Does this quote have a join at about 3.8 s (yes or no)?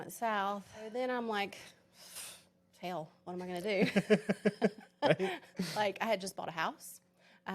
no